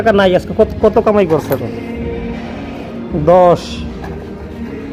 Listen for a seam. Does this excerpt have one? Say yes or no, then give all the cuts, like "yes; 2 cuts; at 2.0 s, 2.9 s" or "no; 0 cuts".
no; 0 cuts